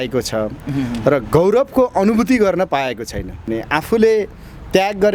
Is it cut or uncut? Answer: cut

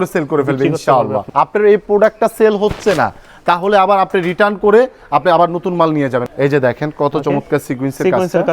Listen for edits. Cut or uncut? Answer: cut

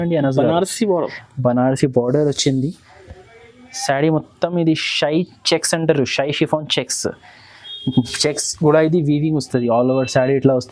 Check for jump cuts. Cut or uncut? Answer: uncut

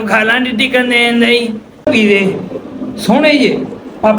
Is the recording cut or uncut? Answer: cut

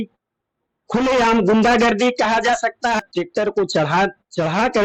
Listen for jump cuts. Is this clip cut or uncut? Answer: cut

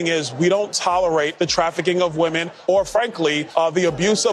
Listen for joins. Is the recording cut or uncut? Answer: uncut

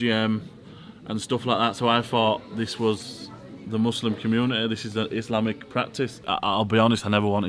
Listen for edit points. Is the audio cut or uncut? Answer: cut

